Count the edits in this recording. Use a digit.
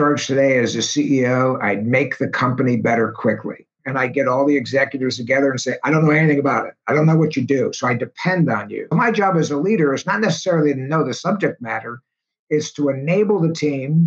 2